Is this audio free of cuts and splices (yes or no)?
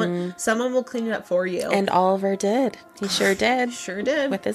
yes